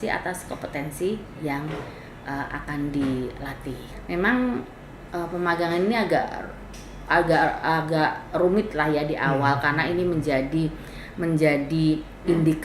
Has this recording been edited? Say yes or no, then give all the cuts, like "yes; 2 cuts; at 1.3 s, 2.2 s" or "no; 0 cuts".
yes; 1 cut; at 3.9 s